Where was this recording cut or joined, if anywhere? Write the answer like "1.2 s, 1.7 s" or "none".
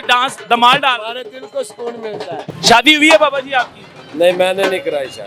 2.5 s